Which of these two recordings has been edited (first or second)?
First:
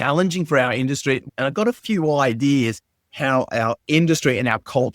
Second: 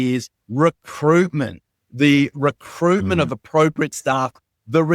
first